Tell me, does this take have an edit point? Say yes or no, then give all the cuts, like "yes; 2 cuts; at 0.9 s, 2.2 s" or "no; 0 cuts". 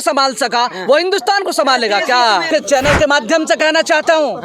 yes; 1 cut; at 2.5 s